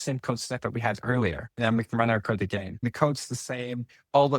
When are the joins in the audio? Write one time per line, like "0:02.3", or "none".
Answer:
0:01.5
0:02.9